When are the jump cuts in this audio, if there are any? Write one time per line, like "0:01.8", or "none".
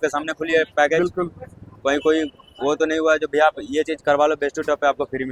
none